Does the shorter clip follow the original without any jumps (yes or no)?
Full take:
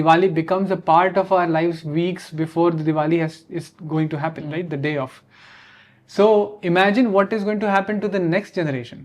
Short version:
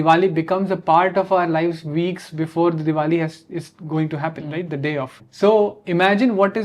no